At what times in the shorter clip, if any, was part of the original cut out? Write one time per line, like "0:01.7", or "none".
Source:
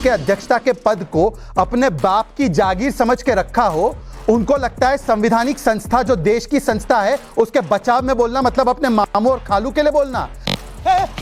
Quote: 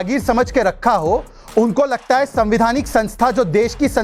none